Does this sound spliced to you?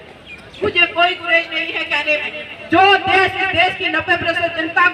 no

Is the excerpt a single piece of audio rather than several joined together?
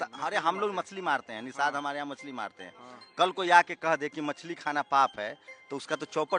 yes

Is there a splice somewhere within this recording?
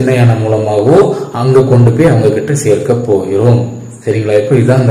no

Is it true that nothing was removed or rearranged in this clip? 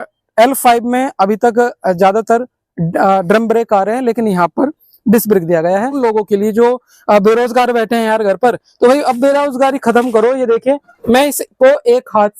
no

